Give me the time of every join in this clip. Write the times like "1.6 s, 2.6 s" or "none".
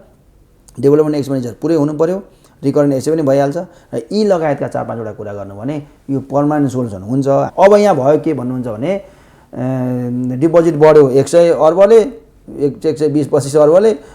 7.5 s